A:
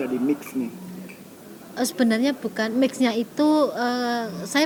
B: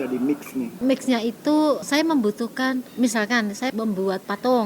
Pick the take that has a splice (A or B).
B